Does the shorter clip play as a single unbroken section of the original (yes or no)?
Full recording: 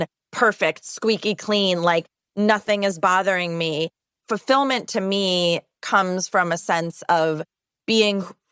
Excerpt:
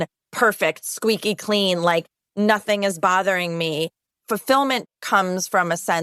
no